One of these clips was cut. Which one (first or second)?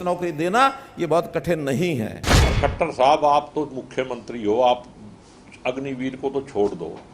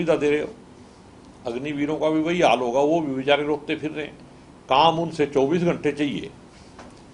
first